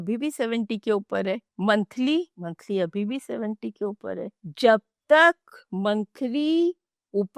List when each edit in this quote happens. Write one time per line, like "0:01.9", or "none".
none